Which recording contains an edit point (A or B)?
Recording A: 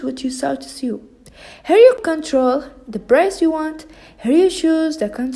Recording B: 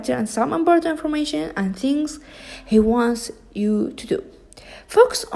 A